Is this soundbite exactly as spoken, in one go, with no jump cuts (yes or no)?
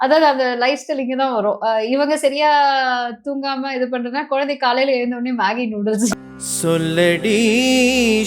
no